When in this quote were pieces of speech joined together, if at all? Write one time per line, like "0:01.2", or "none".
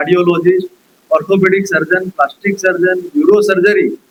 none